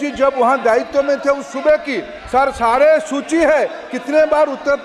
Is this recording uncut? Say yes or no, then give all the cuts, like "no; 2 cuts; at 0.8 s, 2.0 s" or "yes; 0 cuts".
yes; 0 cuts